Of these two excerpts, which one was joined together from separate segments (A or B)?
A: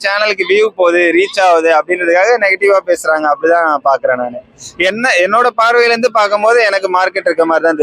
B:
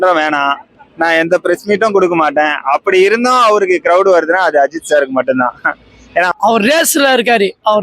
B